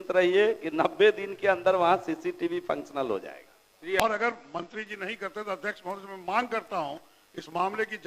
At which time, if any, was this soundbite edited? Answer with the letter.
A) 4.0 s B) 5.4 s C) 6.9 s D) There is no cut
A